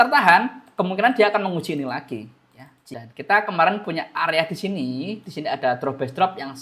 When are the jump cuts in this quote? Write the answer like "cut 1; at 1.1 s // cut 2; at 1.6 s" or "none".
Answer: cut 1; at 2.7 s